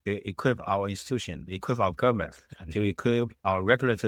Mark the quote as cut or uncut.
uncut